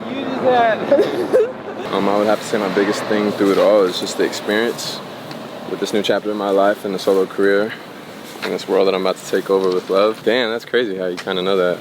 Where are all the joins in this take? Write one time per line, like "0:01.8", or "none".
0:01.8
0:10.2